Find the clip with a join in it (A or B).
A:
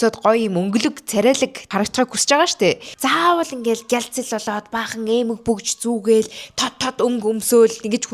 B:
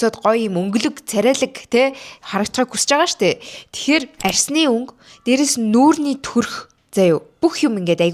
A